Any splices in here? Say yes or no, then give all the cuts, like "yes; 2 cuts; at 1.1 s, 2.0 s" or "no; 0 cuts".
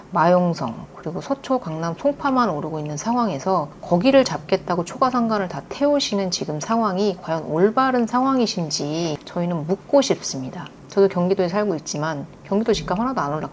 no; 0 cuts